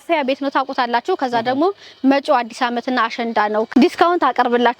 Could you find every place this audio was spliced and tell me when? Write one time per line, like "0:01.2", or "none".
0:03.7